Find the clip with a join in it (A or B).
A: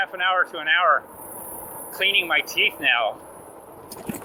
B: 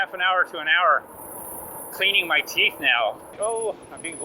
B